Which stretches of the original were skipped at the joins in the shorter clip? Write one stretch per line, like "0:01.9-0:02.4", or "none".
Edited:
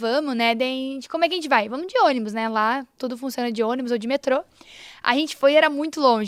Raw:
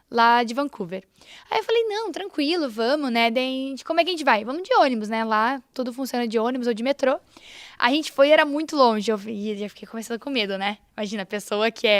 none